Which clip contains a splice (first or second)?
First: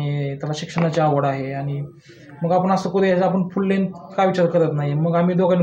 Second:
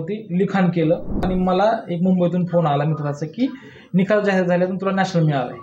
second